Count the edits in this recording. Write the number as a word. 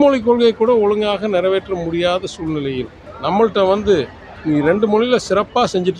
one